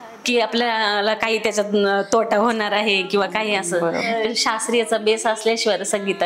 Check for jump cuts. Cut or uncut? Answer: cut